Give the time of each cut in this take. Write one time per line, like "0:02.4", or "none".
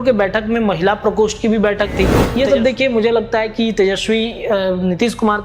0:02.2